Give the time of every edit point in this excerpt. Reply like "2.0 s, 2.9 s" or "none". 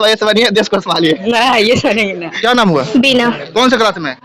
2.3 s